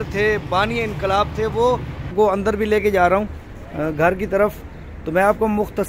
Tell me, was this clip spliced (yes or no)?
yes